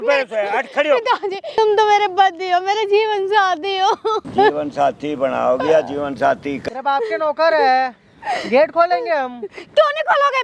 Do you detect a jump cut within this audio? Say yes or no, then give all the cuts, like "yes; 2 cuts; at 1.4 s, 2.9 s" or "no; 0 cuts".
yes; 3 cuts; at 1.5 s, 4.2 s, 6.5 s